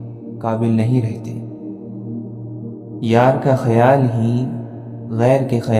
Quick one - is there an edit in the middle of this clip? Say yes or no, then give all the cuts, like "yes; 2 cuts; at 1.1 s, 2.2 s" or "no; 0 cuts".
yes; 2 cuts; at 1.1 s, 3.0 s